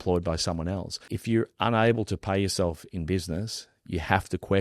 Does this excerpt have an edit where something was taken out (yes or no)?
yes